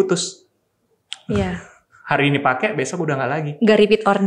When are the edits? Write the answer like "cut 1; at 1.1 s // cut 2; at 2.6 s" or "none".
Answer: none